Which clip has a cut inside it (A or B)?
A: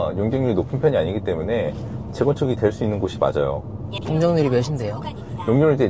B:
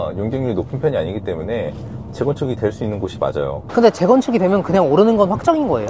B